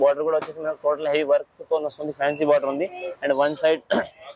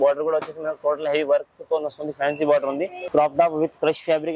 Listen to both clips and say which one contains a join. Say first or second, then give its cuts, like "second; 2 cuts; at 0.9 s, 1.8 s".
second; 1 cut; at 3.0 s